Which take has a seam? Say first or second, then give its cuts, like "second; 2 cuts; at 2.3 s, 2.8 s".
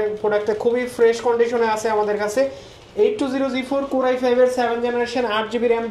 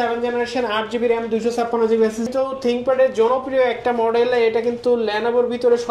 second; 1 cut; at 2.3 s